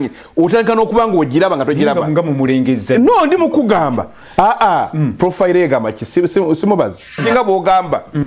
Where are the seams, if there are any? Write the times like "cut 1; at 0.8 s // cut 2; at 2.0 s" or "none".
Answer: cut 1; at 7.2 s